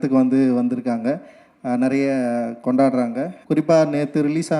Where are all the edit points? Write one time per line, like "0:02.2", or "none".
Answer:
0:03.3